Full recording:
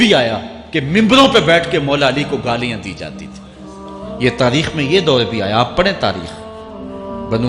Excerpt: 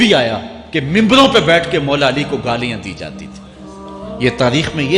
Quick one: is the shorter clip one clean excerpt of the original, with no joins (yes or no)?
yes